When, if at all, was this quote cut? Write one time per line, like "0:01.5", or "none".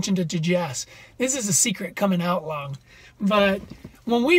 none